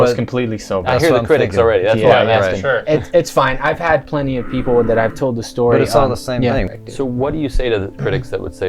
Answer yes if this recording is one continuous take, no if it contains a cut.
no